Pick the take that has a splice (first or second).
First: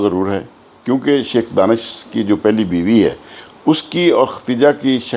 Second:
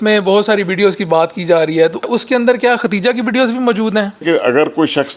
second